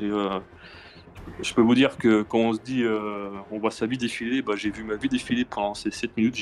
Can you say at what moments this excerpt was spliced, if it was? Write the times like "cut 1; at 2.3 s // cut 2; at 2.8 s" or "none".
none